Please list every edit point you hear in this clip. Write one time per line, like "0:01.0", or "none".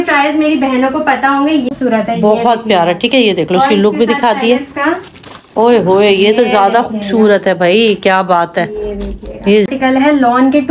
0:01.7
0:09.7